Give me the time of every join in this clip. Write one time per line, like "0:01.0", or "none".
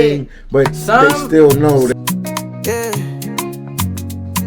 0:01.9